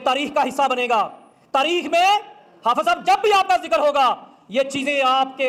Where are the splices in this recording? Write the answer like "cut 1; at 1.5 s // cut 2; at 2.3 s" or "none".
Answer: none

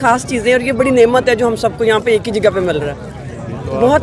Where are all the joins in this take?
none

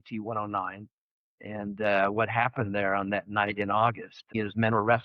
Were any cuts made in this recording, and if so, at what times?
cut 1; at 4.2 s

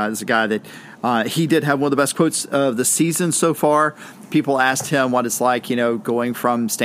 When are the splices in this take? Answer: none

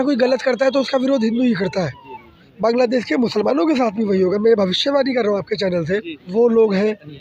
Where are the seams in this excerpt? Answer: cut 1; at 2.4 s // cut 2; at 6.2 s

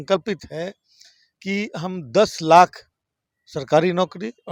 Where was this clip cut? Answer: none

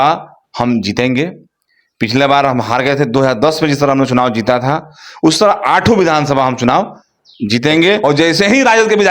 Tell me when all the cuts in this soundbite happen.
cut 1; at 8.0 s

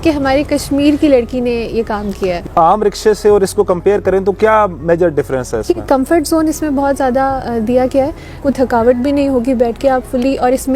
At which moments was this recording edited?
cut 1; at 2.4 s // cut 2; at 5.8 s // cut 3; at 8.4 s

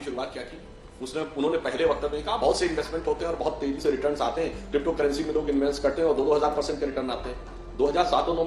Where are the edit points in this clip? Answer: none

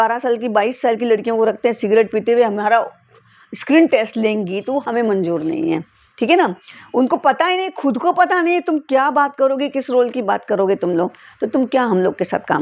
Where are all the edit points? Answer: none

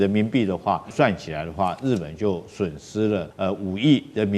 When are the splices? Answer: cut 1; at 0.9 s // cut 2; at 3.3 s

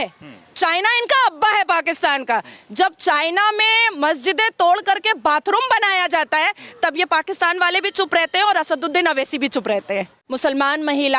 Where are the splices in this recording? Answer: cut 1; at 10.2 s

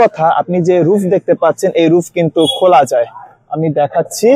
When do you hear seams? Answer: none

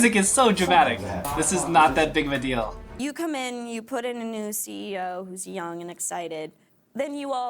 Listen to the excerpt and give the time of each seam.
cut 1; at 1.2 s // cut 2; at 2.8 s

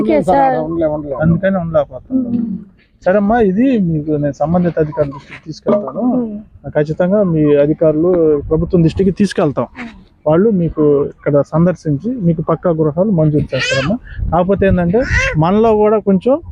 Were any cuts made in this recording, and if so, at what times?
none

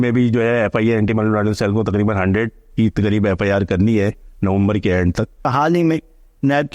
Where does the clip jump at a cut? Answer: cut 1; at 5.5 s

